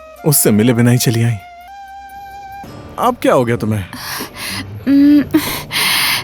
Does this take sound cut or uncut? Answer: cut